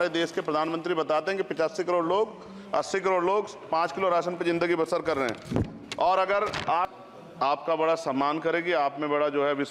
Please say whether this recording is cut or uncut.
cut